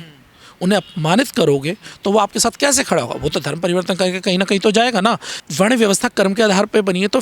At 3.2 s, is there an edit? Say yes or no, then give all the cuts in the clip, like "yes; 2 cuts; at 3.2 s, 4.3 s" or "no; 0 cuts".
no; 2 cuts; at 1.8 s, 5.4 s